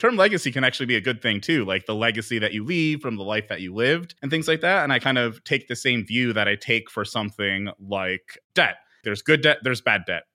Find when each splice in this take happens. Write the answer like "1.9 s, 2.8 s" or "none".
4.1 s, 9.0 s